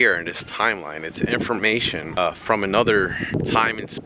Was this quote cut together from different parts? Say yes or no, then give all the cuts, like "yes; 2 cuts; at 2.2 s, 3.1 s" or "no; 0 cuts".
yes; 2 cuts; at 2.2 s, 3.4 s